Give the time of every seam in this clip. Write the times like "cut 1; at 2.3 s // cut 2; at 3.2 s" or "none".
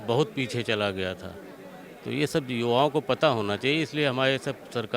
none

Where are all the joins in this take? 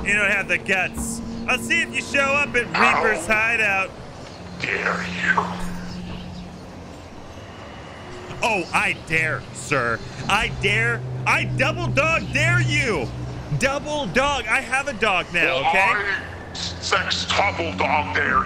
none

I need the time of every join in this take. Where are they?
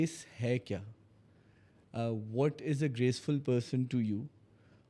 none

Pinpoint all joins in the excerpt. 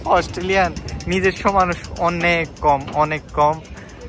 none

